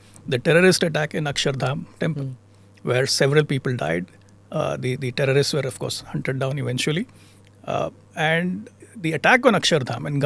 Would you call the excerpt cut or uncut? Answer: uncut